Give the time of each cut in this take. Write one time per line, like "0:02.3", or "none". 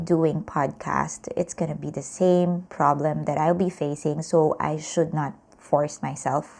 none

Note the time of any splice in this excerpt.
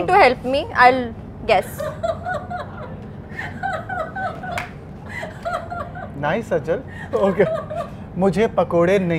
none

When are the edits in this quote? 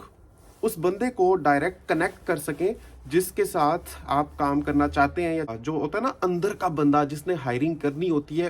0:05.5

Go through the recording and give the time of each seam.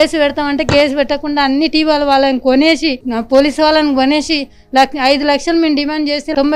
none

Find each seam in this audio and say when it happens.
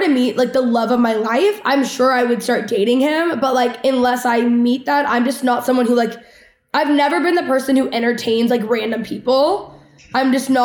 none

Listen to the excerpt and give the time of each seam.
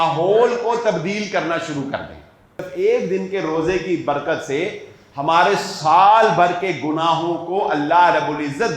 0:02.6

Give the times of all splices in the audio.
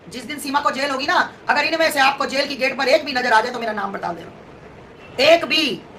none

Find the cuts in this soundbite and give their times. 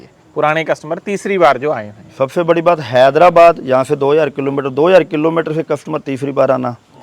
none

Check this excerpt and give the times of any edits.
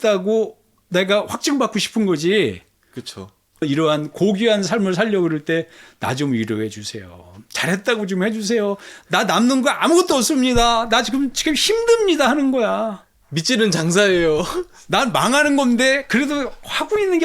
0:03.6

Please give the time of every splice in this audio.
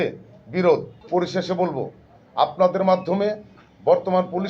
0:00.9

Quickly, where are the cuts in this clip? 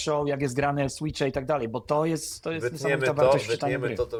none

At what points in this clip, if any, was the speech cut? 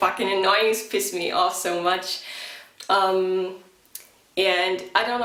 none

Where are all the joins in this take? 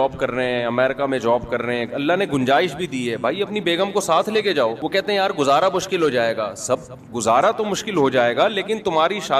0:04.8

